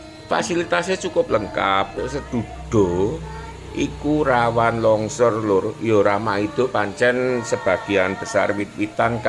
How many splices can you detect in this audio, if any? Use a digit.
1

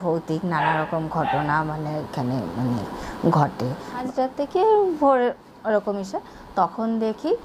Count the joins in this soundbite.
1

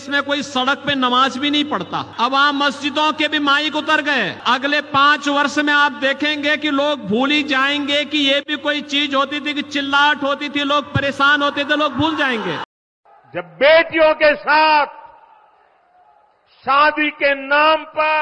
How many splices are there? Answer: 3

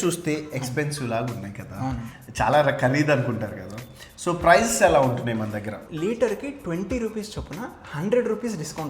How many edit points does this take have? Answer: 1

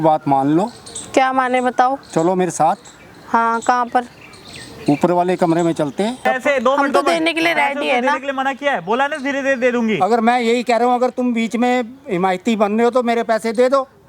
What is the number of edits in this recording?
1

